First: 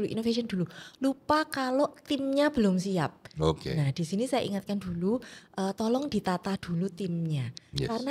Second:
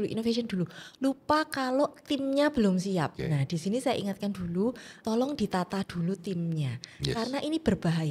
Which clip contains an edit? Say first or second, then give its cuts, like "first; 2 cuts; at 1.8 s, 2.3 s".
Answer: second; 2 cuts; at 3.2 s, 5.0 s